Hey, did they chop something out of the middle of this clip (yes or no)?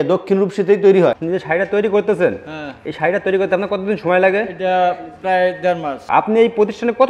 yes